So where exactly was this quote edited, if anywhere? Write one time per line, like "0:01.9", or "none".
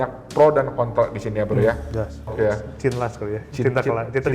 0:02.3